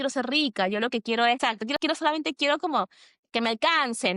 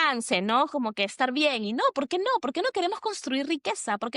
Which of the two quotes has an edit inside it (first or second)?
first